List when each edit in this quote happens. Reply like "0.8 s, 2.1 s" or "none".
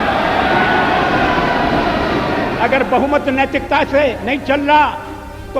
2.6 s